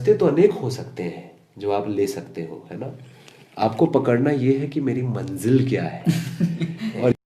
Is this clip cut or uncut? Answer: uncut